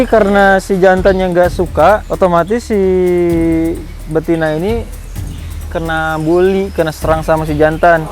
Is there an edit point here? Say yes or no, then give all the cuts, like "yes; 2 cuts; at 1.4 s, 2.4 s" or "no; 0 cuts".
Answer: no; 0 cuts